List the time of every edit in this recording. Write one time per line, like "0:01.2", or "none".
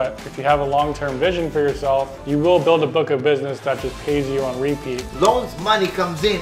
0:02.2
0:05.0